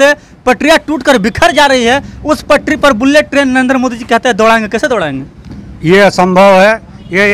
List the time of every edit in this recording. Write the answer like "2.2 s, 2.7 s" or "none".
none